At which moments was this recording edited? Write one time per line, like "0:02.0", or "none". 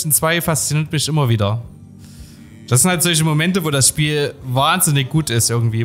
none